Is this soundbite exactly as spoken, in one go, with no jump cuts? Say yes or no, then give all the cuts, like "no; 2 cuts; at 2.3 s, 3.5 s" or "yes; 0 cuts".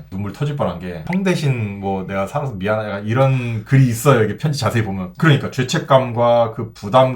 no; 1 cut; at 5.1 s